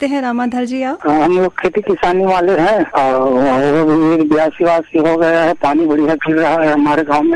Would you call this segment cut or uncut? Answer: uncut